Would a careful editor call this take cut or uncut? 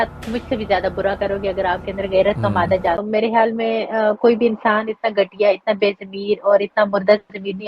cut